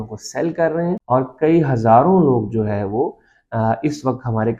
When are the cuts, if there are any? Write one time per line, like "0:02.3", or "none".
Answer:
0:01.0